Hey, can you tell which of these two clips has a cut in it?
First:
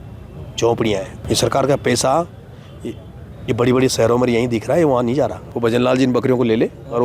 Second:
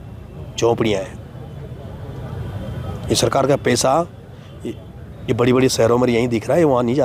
first; 2 cuts; at 1.2 s, 5.4 s

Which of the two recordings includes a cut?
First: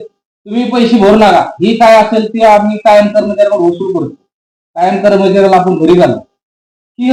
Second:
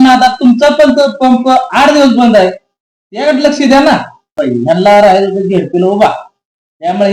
second; 1 cut; at 4.4 s

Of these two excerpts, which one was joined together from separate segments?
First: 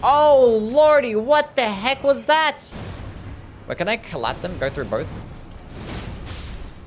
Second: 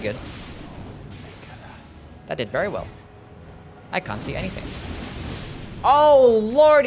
first; 1 cut; at 2.7 s

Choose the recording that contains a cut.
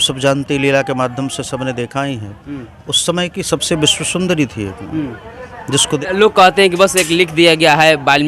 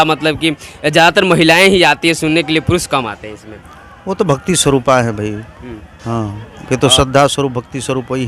first; 1 cut; at 6.0 s

